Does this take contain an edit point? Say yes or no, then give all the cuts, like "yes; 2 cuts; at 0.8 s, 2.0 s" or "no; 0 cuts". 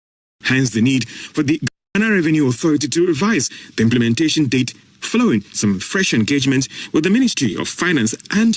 no; 0 cuts